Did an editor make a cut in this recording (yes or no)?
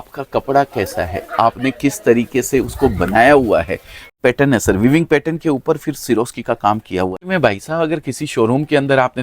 yes